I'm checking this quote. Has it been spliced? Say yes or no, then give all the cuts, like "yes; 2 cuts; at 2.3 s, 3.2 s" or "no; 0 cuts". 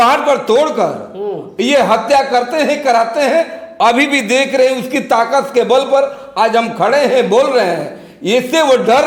no; 0 cuts